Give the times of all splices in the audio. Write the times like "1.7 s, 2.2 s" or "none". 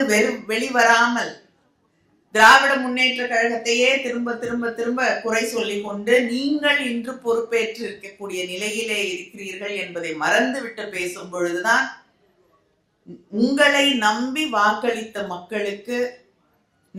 none

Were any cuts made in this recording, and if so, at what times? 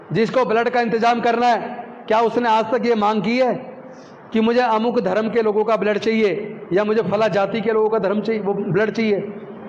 none

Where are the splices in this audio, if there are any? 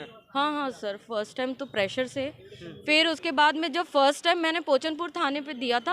none

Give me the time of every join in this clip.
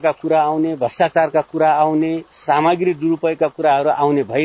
2.3 s

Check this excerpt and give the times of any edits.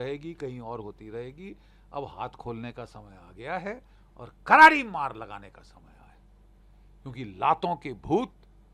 none

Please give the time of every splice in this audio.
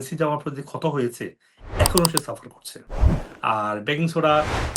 3.2 s

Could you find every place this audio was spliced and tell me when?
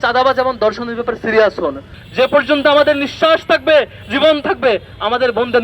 2.0 s

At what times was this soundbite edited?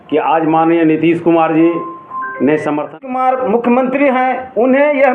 2.9 s

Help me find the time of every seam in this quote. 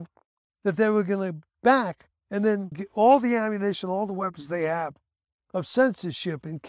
2.6 s

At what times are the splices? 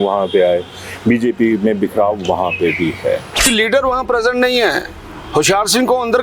3.4 s

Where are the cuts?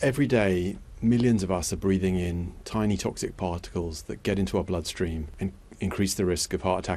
5.3 s

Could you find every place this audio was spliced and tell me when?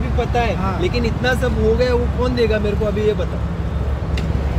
none

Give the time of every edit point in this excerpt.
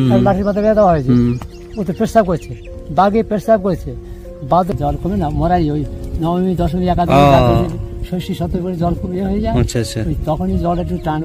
4.7 s

